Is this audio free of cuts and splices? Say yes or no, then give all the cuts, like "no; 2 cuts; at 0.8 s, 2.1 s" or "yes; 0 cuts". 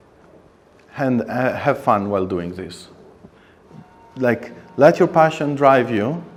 yes; 0 cuts